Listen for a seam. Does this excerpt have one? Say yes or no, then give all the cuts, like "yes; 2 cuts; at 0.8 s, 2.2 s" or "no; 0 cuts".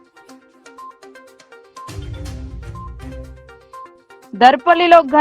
yes; 2 cuts; at 1.3 s, 4.1 s